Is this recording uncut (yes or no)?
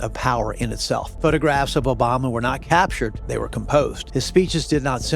no